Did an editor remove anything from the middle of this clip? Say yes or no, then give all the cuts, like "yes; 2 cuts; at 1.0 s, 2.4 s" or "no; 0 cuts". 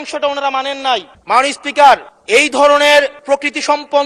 yes; 3 cuts; at 1.1 s, 2.1 s, 3.2 s